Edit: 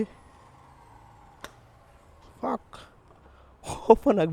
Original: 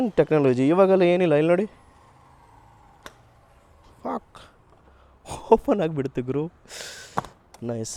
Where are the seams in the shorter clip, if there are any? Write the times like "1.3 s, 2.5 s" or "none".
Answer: none